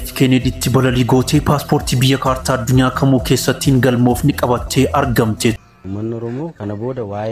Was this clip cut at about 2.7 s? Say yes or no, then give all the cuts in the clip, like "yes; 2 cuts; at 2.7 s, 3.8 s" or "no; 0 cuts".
no; 1 cut; at 5.6 s